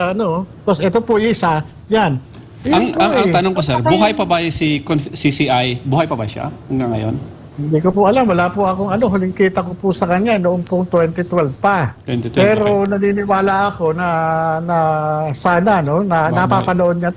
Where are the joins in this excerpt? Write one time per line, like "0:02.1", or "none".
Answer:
none